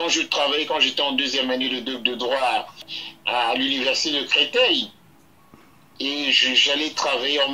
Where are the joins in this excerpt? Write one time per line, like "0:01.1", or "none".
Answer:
0:02.9